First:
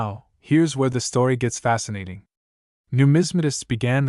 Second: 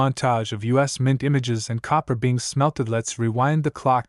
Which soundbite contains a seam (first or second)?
first